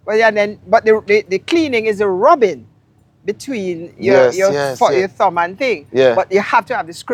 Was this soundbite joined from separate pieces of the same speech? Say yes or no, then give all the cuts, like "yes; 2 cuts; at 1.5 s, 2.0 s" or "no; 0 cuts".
no; 0 cuts